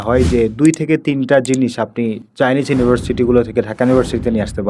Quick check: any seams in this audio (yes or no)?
no